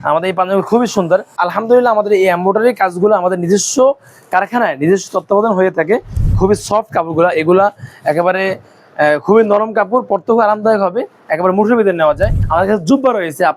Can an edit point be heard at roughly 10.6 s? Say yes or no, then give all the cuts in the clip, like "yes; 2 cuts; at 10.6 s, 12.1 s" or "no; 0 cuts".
no; 3 cuts; at 1.4 s, 6.3 s, 12.4 s